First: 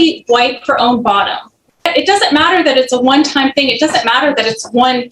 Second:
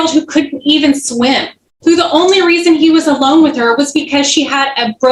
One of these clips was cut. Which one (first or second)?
first